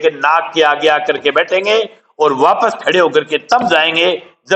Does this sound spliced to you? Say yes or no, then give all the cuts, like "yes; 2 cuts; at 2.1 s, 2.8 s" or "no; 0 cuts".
no; 0 cuts